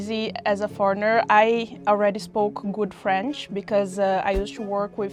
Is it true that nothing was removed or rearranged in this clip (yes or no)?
yes